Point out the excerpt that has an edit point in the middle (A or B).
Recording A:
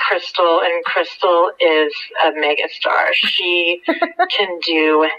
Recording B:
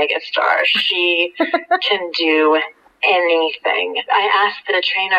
B